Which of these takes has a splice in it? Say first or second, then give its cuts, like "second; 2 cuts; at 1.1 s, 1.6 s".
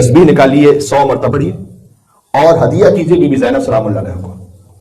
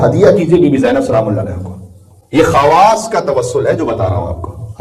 first; 1 cut; at 1.3 s